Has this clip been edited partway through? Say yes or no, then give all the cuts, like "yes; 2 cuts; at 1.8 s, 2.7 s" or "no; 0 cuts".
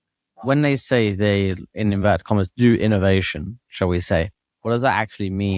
no; 0 cuts